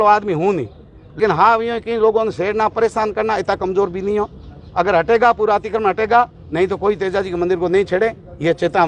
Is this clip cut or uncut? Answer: cut